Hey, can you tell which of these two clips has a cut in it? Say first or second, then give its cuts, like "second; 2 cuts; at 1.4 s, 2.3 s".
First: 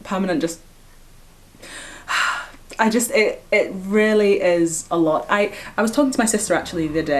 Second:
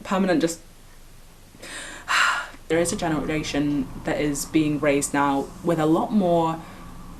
second; 1 cut; at 2.7 s